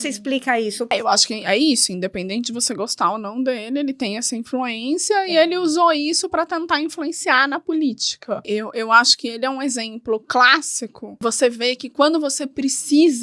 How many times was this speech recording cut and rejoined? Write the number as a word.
three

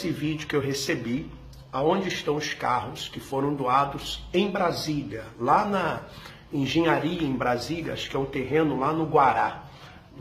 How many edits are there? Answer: zero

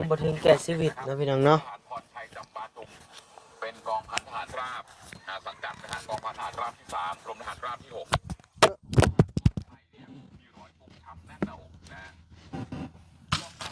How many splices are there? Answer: zero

